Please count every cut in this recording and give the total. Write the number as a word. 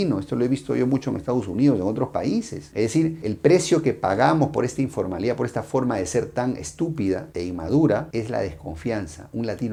zero